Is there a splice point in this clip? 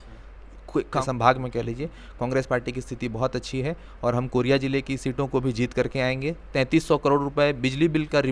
yes; 2 cuts; at 1.0 s, 6.5 s

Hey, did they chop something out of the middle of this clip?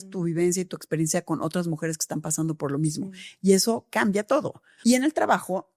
yes; 1 cut; at 4.6 s

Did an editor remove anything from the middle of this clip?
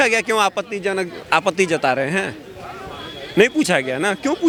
no; 0 cuts

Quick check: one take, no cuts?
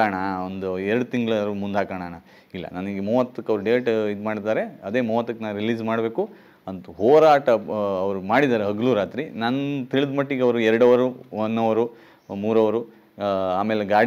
yes; 0 cuts

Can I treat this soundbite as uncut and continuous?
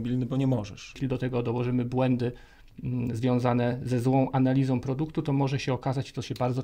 no; 1 cut; at 1.0 s

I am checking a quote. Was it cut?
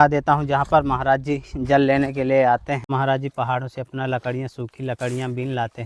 yes; 1 cut; at 2.9 s

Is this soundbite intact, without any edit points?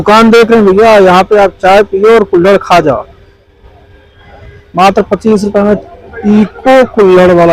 yes; 0 cuts

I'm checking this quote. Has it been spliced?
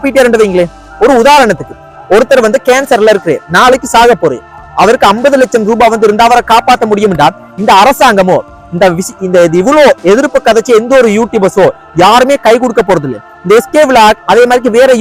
no; 0 cuts

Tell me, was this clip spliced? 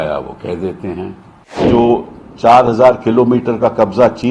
yes; 1 cut; at 1.7 s

